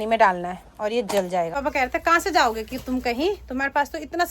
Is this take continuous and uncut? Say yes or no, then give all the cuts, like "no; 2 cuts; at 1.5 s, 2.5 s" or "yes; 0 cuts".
no; 1 cut; at 1.5 s